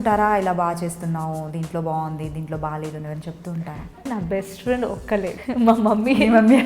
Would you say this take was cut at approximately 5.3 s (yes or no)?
yes